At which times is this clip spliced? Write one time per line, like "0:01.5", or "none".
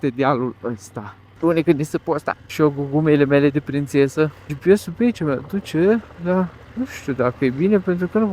0:01.2
0:02.4
0:04.5
0:06.6